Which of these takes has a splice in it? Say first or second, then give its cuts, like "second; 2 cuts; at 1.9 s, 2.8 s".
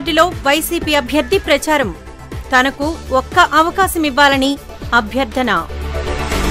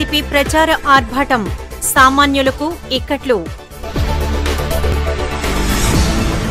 second; 1 cut; at 4.9 s